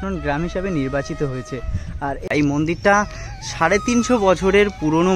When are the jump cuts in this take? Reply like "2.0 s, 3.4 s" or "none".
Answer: 2.3 s